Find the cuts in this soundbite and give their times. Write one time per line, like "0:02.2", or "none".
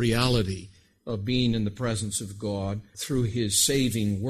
0:02.9